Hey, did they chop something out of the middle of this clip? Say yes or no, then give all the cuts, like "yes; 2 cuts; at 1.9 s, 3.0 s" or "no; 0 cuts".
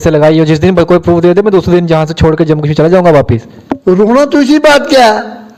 no; 0 cuts